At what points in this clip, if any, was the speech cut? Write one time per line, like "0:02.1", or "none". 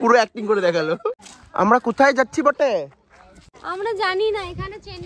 0:01.2
0:03.6